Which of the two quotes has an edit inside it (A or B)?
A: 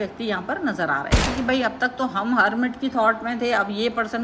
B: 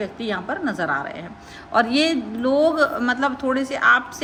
A